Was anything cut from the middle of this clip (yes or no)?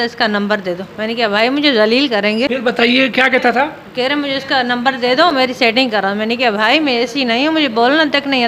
yes